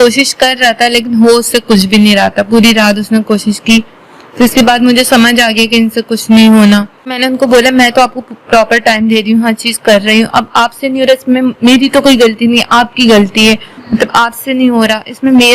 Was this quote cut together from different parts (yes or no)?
yes